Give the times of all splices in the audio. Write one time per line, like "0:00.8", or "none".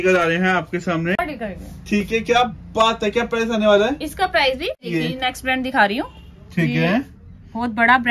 0:01.2
0:04.8